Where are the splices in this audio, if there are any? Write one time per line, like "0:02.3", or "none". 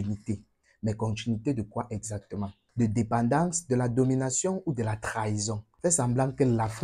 0:05.6